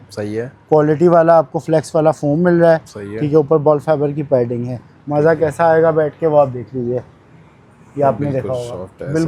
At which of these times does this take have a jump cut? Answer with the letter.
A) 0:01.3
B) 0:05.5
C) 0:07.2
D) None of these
D